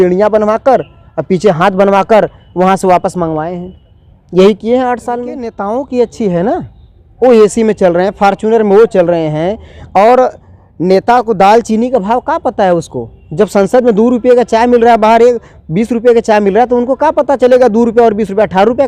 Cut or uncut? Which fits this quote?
cut